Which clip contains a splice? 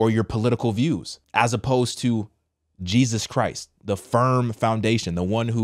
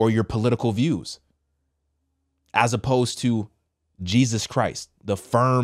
first; 1 cut; at 1.2 s

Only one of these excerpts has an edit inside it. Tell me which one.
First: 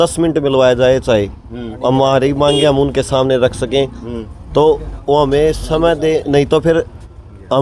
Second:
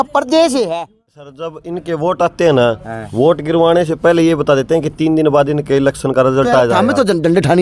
second; 1 cut; at 1.4 s

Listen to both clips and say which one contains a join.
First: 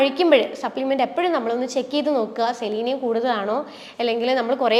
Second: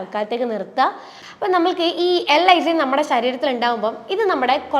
second; 1 cut; at 1.1 s

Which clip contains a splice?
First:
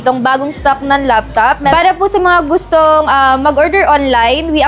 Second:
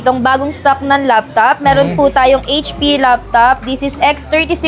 first; 1 cut; at 1.7 s

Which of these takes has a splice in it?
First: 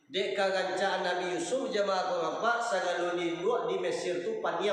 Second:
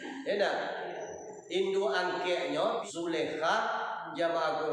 second; 1 cut; at 2.8 s

